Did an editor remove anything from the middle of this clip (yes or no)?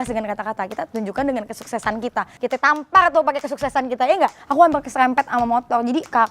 yes